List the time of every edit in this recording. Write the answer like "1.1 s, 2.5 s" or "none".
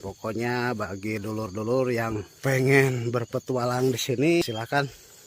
2.3 s, 4.4 s